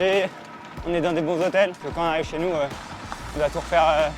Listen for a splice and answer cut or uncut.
cut